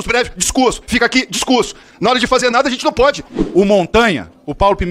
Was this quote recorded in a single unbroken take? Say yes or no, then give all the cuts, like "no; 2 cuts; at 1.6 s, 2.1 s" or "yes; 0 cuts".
no; 1 cut; at 3.3 s